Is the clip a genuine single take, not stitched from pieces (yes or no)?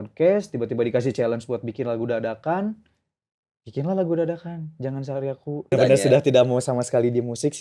no